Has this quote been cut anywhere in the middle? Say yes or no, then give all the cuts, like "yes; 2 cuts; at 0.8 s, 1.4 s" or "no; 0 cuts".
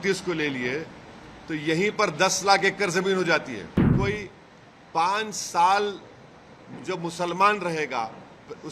yes; 1 cut; at 3.9 s